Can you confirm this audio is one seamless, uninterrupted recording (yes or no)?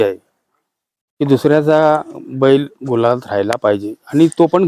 yes